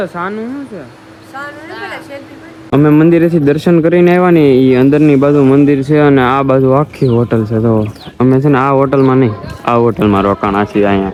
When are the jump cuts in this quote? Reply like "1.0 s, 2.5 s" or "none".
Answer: none